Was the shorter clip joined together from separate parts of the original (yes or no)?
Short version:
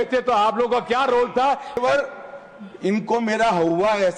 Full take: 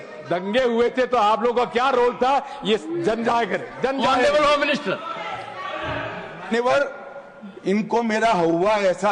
yes